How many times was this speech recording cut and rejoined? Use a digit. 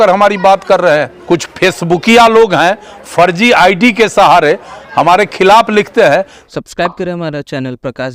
2